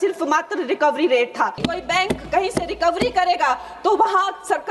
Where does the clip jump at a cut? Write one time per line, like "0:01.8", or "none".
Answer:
0:01.6